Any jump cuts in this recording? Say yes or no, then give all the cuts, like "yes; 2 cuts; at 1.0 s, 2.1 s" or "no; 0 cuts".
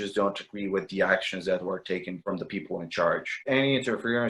yes; 1 cut; at 3.3 s